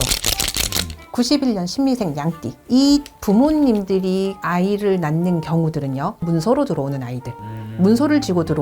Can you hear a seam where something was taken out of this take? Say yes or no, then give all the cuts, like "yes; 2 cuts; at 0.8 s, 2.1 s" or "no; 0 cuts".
yes; 1 cut; at 6.3 s